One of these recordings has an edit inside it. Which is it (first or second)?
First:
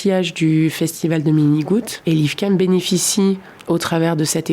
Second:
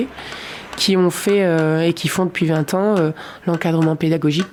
first